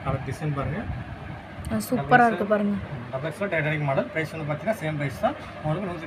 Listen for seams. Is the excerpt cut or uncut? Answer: uncut